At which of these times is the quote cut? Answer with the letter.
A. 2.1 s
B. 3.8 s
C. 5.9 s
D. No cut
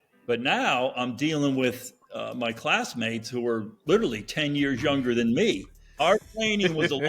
C